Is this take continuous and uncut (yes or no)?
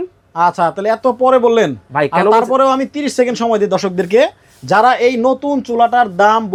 yes